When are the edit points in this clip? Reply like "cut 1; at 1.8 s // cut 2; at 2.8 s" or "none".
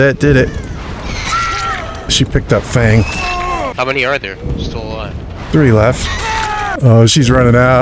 cut 1; at 2.1 s // cut 2; at 3.7 s // cut 3; at 6.7 s